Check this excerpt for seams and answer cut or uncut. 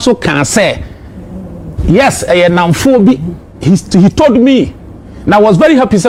uncut